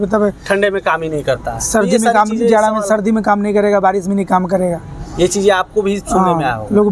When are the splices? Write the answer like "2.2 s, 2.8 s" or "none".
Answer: none